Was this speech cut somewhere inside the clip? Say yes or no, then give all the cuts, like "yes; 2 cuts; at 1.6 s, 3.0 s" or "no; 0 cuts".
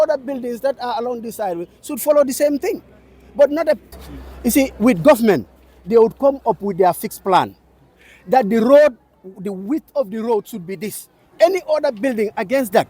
yes; 1 cut; at 3.9 s